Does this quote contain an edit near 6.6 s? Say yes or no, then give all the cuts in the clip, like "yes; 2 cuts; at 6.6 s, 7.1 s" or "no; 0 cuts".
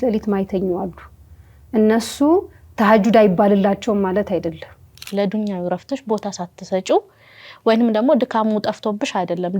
no; 1 cut; at 5.1 s